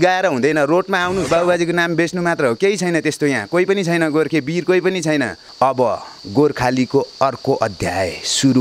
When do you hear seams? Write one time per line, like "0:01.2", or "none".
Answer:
0:01.3
0:05.4